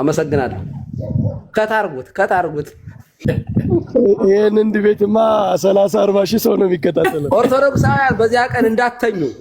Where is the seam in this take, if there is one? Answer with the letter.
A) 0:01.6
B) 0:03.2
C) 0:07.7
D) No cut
B